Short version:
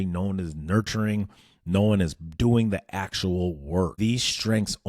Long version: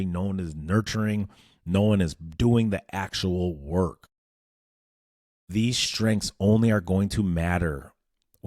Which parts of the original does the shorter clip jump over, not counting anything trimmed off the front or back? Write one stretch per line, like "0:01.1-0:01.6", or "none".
0:03.9-0:05.5